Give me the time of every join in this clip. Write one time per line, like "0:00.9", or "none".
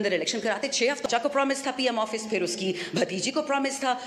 0:01.1